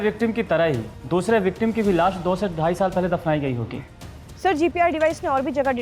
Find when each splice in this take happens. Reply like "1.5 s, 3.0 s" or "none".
0.9 s, 3.9 s